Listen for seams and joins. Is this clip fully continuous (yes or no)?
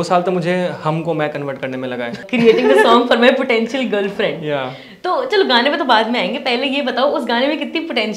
no